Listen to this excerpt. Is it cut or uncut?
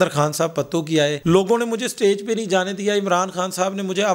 uncut